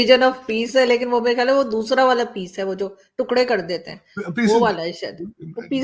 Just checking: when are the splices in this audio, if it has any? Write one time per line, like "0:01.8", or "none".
none